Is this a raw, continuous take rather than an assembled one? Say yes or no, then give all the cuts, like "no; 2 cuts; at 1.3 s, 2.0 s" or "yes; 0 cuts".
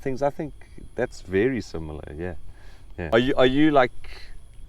no; 1 cut; at 3.1 s